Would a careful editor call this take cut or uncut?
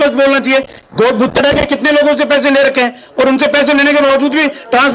uncut